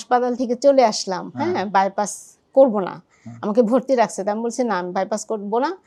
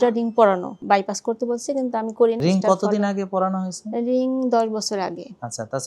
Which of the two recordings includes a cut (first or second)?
second